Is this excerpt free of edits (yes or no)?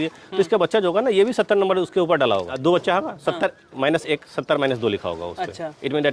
no